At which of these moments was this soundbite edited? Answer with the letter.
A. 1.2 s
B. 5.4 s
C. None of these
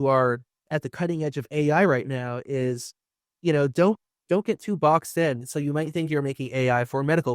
B